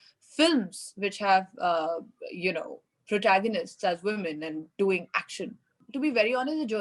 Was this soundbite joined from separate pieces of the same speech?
yes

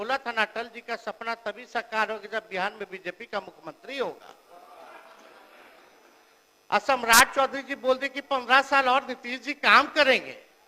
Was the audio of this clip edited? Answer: no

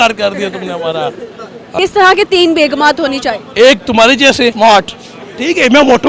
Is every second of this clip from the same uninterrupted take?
no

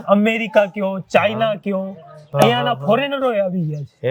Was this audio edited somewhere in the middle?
no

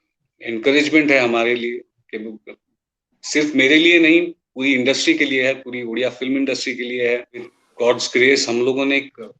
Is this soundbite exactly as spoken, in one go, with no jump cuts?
no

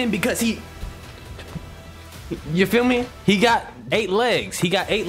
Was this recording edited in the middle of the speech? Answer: yes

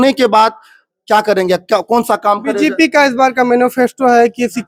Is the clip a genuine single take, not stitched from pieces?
yes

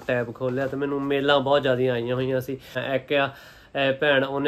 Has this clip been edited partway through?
yes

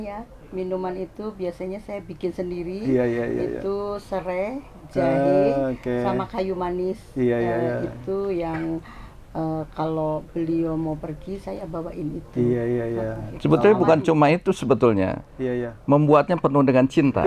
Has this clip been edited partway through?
no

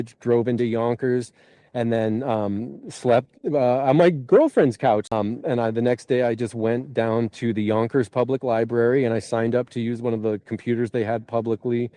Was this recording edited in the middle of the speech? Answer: yes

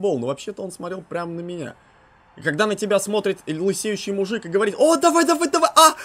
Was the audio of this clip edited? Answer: no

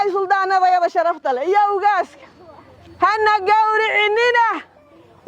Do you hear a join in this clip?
no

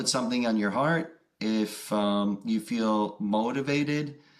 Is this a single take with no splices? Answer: yes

